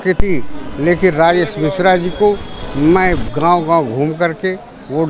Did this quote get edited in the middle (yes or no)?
no